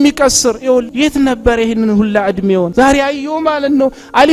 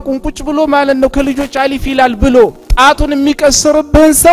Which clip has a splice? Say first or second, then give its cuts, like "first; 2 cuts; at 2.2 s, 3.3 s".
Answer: first; 2 cuts; at 0.9 s, 2.7 s